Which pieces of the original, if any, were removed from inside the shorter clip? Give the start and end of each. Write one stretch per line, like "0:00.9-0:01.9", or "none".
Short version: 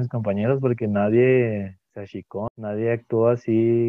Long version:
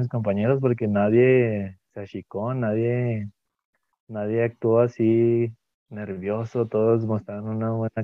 0:02.4-0:03.9